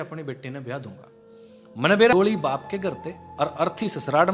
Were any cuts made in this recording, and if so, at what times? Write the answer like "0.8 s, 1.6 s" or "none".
2.1 s